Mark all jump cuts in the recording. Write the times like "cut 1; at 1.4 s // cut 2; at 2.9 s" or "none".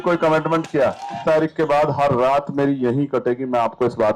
cut 1; at 1.2 s